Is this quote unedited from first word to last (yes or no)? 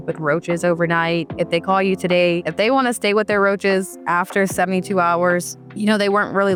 yes